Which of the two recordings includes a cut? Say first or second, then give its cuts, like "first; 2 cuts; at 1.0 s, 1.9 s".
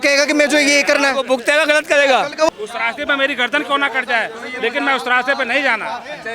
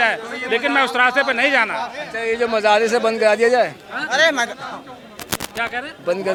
first; 1 cut; at 2.5 s